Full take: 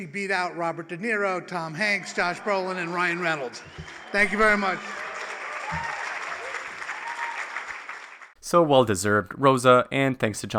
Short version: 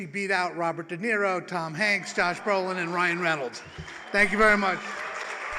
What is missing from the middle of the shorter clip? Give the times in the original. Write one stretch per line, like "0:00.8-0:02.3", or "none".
none